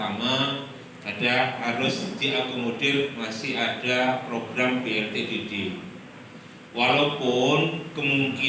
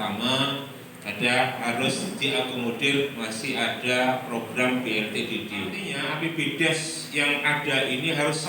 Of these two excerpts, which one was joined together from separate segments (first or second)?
second